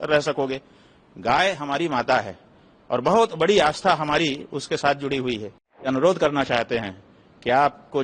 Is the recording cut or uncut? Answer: cut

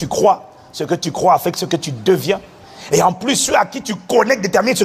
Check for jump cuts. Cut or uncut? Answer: uncut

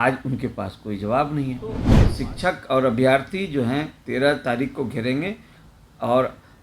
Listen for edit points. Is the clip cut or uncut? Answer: cut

